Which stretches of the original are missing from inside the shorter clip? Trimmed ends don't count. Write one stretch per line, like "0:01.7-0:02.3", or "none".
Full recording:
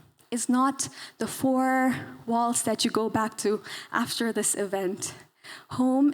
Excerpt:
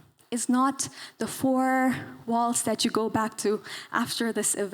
none